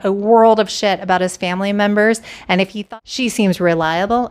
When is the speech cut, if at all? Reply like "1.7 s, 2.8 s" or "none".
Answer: 2.8 s